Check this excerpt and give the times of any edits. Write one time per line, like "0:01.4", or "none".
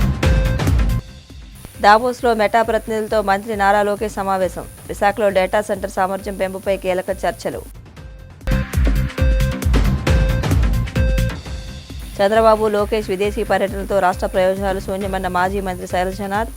0:00.9